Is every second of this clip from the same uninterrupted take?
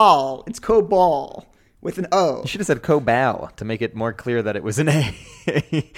yes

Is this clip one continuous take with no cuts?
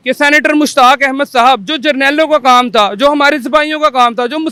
yes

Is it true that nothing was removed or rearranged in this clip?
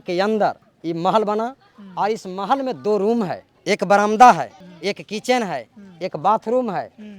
no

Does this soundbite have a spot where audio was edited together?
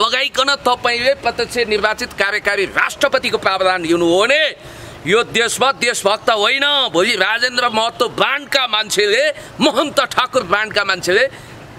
no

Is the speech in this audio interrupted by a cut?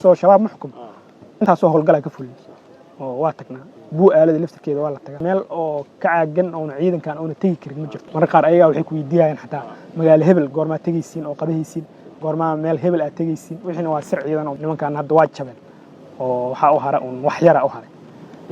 yes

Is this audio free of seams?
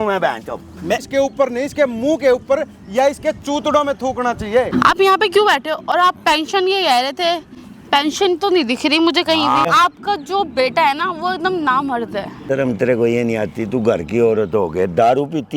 no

